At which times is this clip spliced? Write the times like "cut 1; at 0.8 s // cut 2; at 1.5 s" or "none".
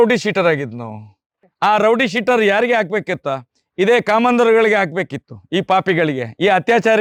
none